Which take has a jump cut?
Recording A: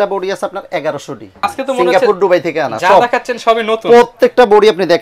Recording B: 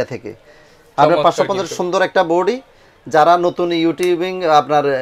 A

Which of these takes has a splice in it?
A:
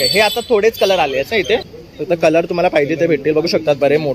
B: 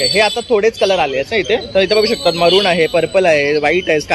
A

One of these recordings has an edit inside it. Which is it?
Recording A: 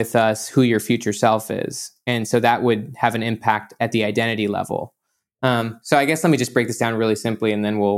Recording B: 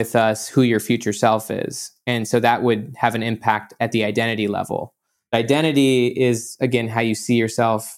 B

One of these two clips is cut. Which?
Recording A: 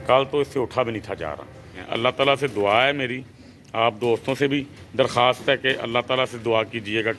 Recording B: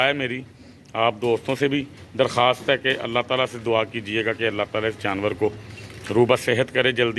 A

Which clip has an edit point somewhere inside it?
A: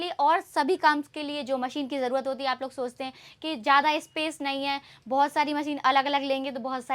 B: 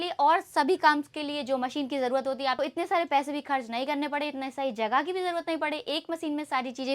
B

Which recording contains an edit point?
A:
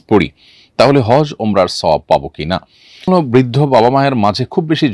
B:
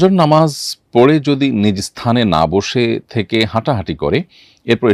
A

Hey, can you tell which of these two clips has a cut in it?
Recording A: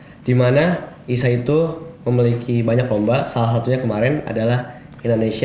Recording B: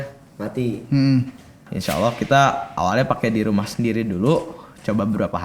B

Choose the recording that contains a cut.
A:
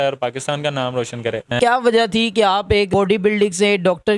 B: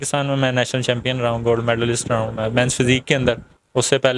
A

